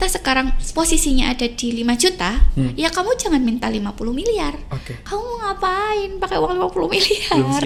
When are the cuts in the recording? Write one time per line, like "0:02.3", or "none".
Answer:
none